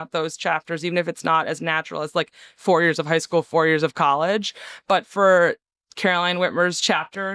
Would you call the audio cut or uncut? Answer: uncut